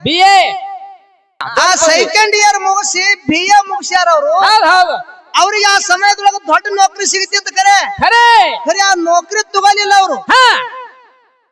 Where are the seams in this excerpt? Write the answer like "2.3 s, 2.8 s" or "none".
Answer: 1.5 s